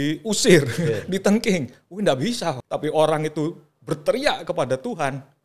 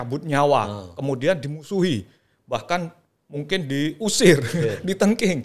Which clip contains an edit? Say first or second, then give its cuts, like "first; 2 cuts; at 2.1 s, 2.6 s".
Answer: first; 1 cut; at 2.6 s